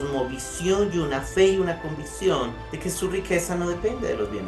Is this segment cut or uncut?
cut